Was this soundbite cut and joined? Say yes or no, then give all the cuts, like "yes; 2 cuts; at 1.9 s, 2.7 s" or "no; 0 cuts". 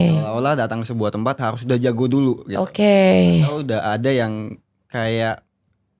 no; 0 cuts